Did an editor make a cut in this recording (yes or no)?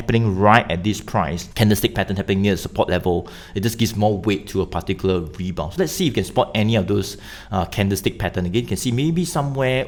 no